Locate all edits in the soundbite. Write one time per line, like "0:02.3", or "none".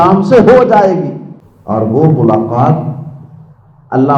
none